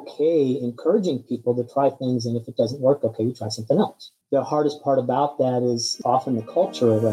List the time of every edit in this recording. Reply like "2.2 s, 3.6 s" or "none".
5.9 s